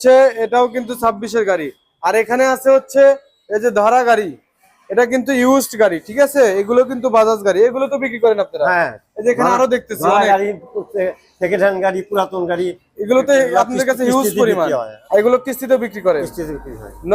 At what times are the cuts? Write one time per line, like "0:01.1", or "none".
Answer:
0:14.9